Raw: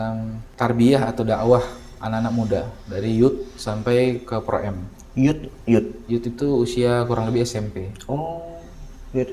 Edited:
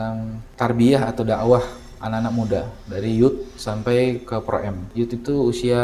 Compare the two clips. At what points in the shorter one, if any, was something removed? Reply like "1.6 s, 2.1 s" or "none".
4.8 s